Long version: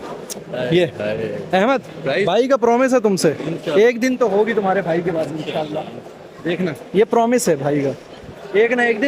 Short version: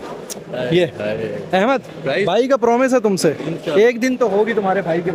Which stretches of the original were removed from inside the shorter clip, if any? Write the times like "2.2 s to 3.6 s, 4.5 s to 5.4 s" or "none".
none